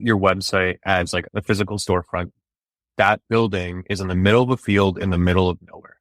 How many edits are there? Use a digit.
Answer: 2